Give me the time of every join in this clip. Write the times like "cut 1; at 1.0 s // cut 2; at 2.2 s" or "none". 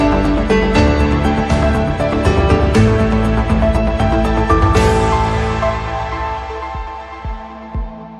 none